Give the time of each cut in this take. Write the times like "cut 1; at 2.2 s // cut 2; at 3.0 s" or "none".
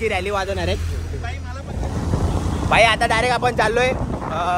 cut 1; at 1.7 s